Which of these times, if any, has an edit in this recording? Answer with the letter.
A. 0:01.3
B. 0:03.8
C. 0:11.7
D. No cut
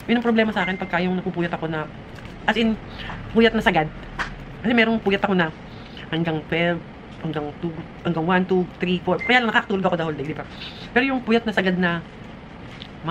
D